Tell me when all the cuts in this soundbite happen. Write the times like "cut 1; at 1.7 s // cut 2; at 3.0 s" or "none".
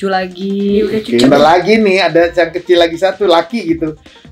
cut 1; at 1.0 s

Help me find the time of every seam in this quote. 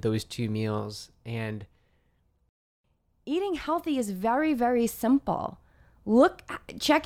cut 1; at 2.6 s

